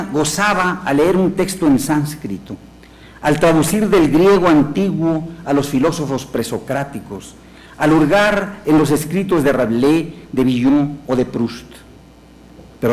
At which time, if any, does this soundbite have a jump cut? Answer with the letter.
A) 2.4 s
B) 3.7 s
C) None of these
B